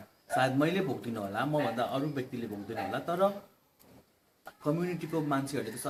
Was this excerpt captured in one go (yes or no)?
yes